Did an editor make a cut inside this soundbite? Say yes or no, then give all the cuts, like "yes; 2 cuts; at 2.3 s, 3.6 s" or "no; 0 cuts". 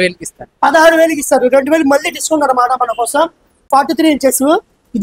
yes; 1 cut; at 3.6 s